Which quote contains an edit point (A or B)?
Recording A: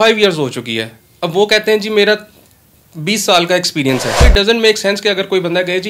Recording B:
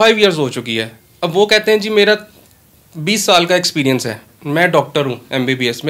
A